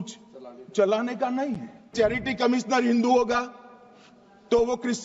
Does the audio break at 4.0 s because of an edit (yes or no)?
no